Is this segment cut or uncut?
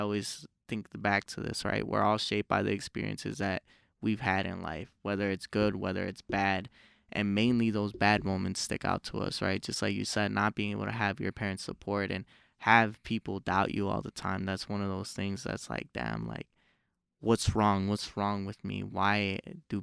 uncut